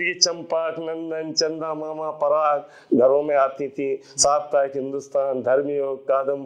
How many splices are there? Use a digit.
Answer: 0